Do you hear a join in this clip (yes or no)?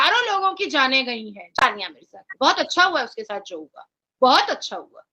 yes